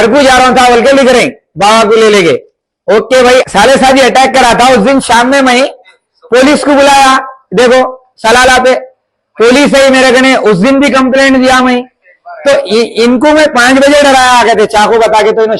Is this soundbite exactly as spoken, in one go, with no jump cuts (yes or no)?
no